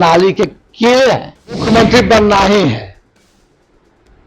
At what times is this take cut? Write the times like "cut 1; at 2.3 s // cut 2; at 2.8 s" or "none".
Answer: cut 1; at 1.6 s